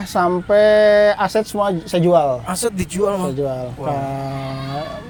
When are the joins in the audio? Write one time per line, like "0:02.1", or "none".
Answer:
none